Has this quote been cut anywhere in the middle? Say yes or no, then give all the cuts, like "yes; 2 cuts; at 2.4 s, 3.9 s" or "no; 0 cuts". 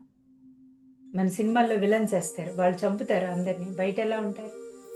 no; 0 cuts